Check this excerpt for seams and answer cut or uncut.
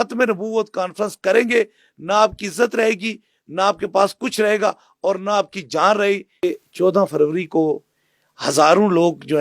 cut